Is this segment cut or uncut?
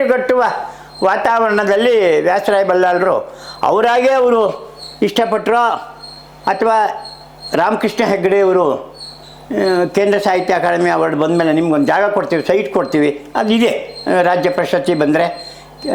uncut